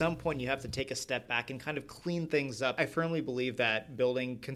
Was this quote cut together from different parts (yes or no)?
yes